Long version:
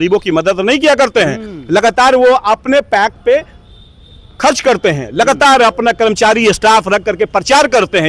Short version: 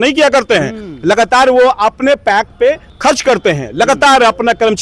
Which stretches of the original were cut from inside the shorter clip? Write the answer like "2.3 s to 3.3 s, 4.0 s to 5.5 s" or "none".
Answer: 3.5 s to 4.3 s